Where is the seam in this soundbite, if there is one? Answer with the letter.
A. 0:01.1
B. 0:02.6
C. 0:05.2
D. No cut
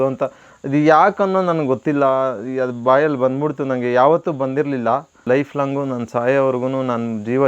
C